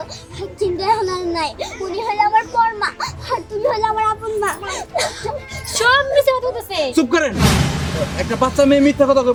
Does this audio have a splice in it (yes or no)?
no